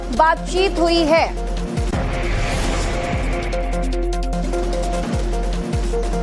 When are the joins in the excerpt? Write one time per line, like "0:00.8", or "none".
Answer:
0:02.0